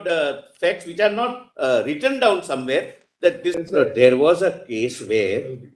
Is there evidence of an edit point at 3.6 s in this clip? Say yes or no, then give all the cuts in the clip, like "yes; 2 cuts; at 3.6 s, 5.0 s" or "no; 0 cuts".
yes; 1 cut; at 3.6 s